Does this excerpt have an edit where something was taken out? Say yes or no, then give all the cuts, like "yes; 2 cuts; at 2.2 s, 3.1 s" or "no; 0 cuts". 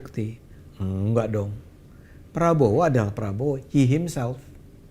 no; 0 cuts